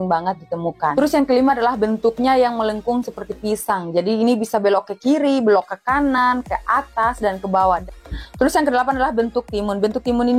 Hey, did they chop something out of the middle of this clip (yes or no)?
yes